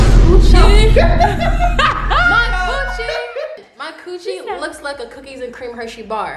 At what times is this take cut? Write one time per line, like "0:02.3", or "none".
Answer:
none